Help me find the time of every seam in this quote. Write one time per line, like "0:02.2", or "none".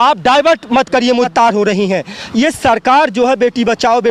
0:01.3